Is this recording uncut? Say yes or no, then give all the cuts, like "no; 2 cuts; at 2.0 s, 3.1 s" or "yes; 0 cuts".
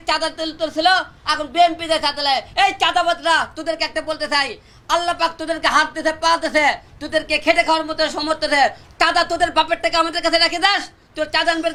yes; 0 cuts